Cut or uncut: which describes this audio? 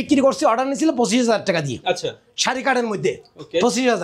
uncut